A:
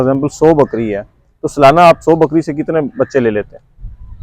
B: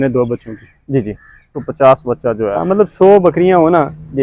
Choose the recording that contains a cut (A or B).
B